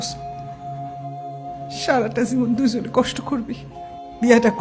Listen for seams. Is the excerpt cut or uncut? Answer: uncut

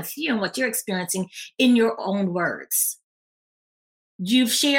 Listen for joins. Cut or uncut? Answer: uncut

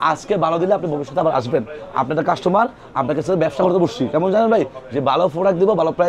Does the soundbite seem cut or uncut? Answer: uncut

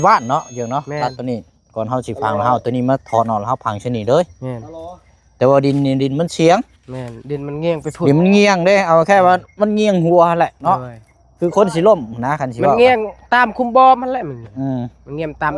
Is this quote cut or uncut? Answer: uncut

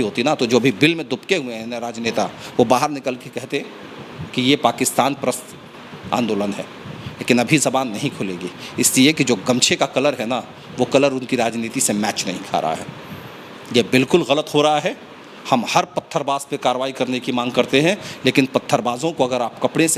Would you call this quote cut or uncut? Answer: uncut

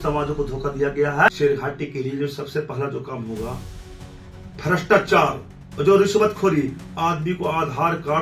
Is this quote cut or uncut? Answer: cut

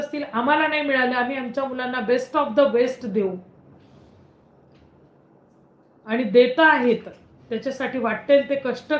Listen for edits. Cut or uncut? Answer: uncut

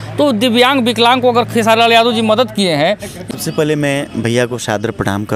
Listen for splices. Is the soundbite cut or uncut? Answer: cut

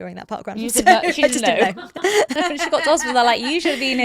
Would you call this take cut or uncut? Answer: uncut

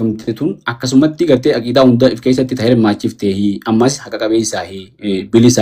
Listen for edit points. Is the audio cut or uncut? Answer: uncut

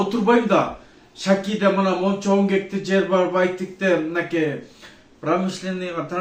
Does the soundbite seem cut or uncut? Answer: uncut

